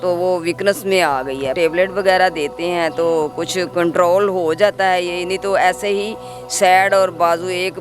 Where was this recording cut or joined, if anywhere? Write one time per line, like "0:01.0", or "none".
0:01.5